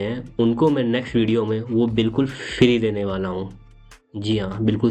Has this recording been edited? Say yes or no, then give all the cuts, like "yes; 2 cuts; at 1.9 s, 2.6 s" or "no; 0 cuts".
no; 0 cuts